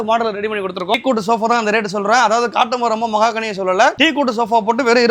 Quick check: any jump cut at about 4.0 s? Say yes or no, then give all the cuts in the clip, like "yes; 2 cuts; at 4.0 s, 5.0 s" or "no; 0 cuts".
yes; 2 cuts; at 0.9 s, 4.0 s